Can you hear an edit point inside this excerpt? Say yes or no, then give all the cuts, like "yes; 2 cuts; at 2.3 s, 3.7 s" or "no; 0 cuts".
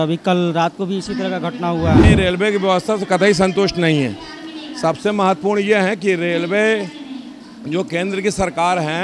yes; 1 cut; at 2.0 s